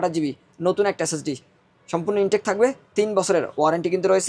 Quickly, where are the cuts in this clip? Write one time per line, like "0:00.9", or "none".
none